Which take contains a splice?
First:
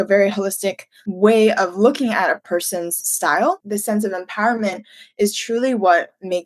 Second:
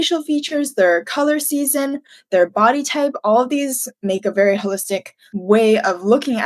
first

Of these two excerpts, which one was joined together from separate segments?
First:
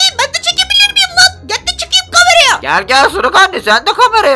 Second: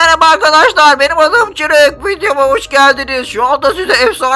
first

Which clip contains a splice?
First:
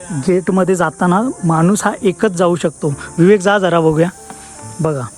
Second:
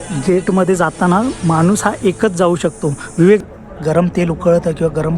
second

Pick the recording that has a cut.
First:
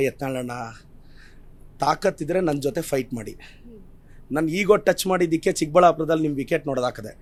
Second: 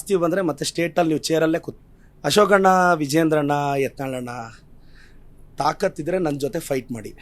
second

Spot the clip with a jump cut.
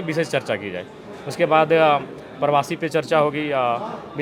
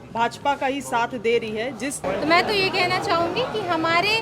second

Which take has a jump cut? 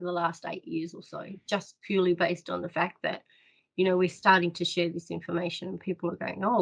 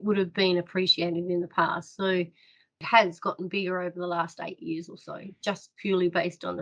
second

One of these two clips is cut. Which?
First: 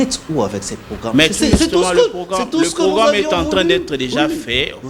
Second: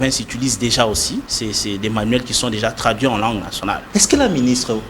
second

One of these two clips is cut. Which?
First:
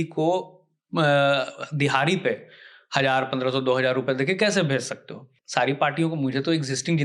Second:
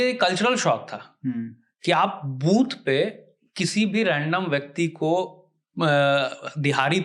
first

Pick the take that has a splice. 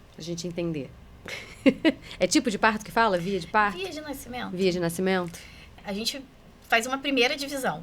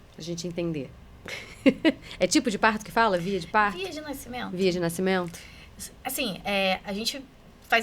first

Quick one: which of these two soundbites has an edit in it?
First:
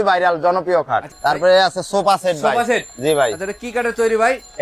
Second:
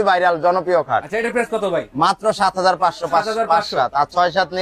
first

